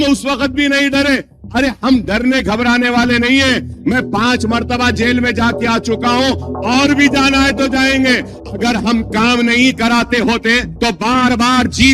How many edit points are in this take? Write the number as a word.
two